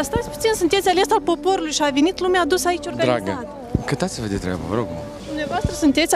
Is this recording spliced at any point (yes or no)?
yes